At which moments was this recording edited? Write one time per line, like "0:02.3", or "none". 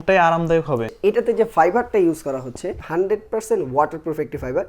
0:00.9
0:02.8